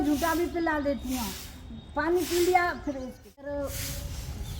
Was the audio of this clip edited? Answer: yes; 1 cut; at 3.7 s

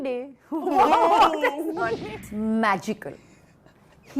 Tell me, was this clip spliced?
yes; 1 cut; at 2.2 s

